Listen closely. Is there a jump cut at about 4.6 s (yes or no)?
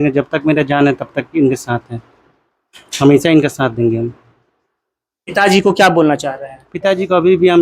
no